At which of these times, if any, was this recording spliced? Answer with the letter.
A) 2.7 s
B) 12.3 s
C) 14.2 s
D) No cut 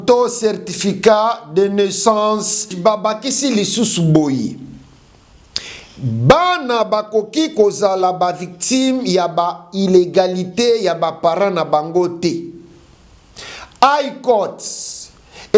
A